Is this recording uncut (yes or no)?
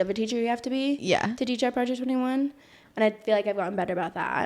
yes